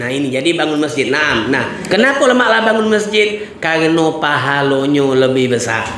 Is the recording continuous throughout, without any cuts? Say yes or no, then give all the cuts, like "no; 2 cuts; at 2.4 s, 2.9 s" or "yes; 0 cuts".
no; 1 cut; at 1.7 s